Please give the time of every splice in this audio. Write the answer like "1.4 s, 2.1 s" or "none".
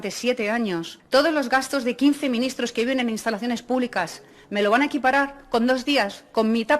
0.9 s